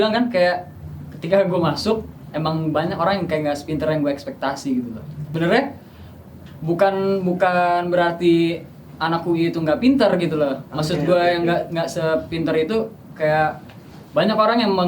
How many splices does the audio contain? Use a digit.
1